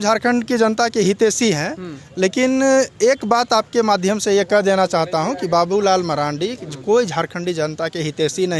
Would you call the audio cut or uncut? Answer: uncut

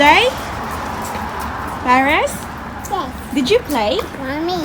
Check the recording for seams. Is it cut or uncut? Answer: uncut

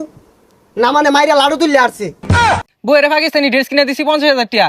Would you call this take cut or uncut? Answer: cut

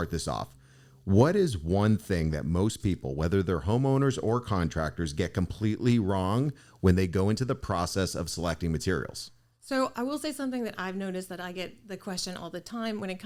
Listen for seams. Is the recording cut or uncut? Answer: uncut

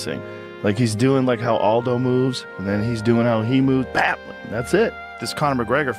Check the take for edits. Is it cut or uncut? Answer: cut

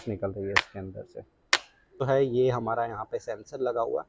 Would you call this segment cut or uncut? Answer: cut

